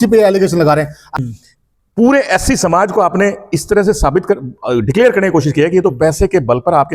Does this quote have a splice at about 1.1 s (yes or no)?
yes